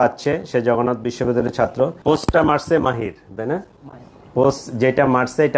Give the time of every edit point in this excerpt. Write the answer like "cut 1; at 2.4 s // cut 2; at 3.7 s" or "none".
cut 1; at 2.0 s